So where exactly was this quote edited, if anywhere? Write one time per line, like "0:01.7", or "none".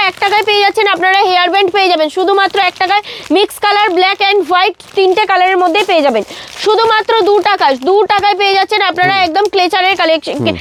none